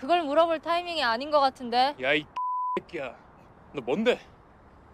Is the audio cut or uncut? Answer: uncut